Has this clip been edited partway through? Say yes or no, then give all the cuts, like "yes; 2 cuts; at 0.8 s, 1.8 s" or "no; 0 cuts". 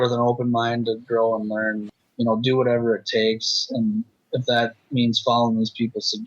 yes; 2 cuts; at 1.8 s, 4.2 s